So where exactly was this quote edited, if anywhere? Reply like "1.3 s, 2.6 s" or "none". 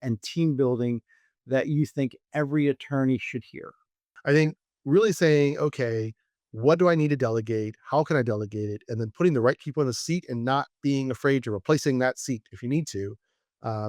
4.1 s